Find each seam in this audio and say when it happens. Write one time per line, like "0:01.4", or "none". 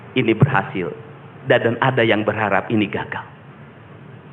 none